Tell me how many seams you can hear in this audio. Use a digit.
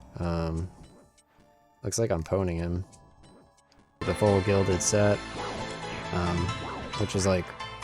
1